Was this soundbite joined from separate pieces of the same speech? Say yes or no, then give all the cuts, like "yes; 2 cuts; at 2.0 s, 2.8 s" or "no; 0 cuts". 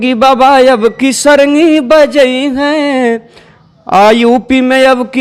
no; 0 cuts